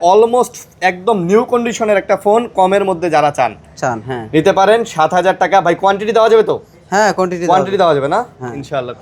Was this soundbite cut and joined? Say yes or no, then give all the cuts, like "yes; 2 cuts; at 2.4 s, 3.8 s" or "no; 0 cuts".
no; 0 cuts